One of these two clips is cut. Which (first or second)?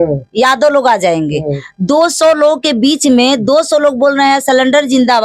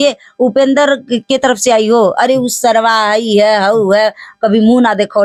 first